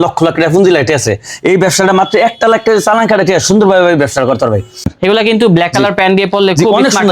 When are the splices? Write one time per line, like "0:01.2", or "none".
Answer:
0:04.9